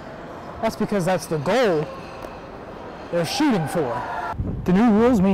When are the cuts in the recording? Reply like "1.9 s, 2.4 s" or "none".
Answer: 4.2 s